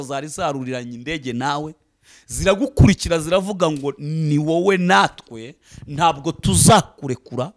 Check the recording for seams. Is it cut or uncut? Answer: uncut